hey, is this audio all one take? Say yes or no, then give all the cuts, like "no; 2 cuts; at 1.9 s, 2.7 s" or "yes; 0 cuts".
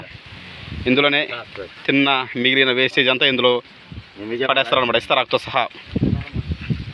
yes; 0 cuts